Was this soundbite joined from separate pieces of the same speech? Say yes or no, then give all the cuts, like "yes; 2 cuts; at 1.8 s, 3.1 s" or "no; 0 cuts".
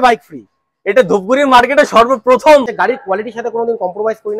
yes; 1 cut; at 2.7 s